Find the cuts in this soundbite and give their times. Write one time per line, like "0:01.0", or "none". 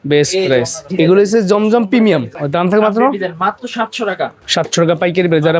0:00.9
0:02.4
0:04.4

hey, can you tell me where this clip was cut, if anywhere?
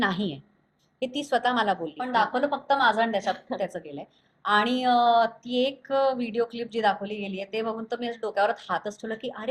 0:02.0

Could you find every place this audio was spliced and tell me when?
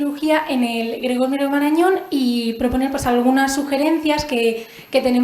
0:01.4

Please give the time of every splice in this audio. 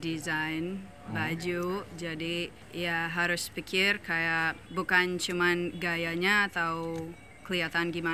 0:02.6
0:04.6

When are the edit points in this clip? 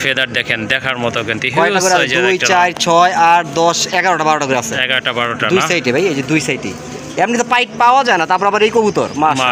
none

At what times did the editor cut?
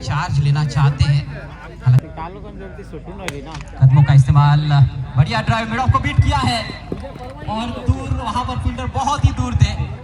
0:02.0

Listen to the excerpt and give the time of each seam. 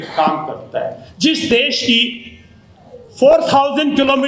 0:01.0

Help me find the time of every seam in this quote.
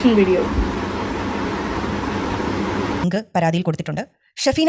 0:03.0

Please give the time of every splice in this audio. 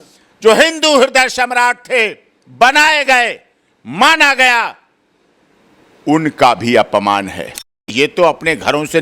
0:07.8

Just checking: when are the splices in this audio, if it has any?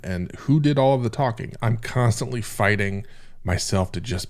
0:01.5

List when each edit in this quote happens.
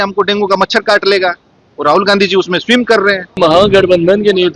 0:03.4

